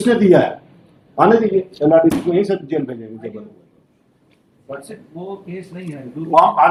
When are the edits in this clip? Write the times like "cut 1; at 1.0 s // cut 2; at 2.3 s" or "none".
none